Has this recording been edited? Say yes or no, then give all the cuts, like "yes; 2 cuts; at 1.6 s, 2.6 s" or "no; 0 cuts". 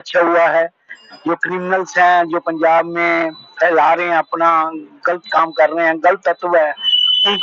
no; 0 cuts